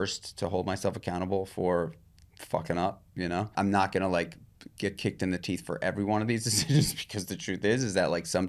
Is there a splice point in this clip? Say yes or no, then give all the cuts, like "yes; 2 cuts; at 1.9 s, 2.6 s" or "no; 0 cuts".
yes; 1 cut; at 3.5 s